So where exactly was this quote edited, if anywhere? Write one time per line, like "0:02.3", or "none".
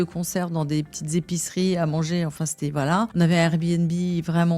0:03.1